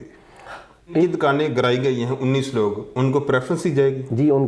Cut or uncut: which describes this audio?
cut